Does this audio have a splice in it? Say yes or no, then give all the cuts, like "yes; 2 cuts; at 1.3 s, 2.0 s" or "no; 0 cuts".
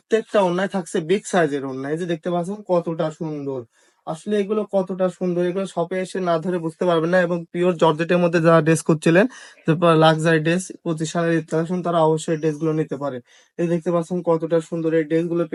no; 0 cuts